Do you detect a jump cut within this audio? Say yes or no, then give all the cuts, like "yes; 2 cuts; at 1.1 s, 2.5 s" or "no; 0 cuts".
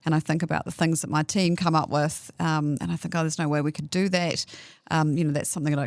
no; 0 cuts